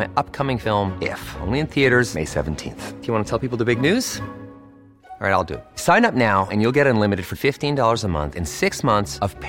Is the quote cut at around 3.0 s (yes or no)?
no